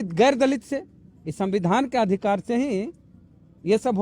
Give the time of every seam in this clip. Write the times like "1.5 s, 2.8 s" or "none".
none